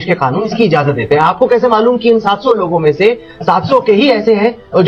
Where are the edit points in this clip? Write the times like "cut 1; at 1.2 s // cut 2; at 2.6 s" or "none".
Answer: none